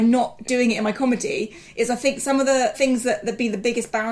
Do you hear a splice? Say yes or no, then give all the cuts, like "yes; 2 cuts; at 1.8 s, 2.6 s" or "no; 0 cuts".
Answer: yes; 1 cut; at 2.8 s